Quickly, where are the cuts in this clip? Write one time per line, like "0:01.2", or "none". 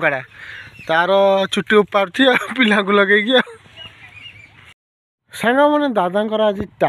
0:04.8